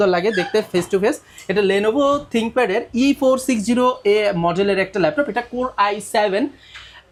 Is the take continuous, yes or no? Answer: yes